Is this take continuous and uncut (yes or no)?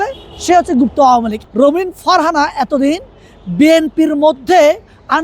no